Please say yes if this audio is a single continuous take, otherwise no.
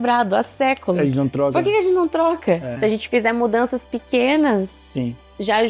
no